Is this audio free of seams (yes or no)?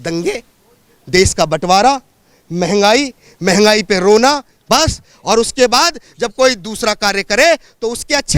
yes